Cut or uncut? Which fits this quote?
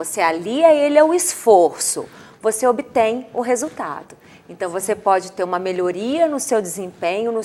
uncut